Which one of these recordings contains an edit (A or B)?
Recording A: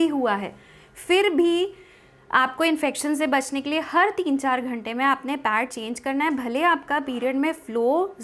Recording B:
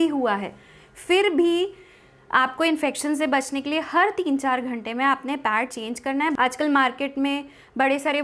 B